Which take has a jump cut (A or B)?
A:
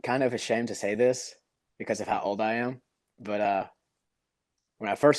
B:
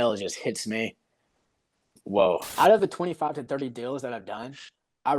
B